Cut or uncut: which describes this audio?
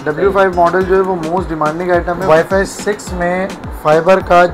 cut